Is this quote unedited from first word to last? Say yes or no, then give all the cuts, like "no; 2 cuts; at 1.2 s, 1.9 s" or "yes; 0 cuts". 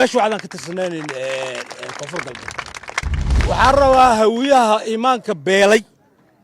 no; 1 cut; at 3.3 s